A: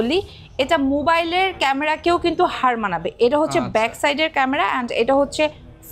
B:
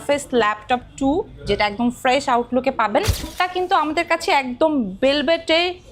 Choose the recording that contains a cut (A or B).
B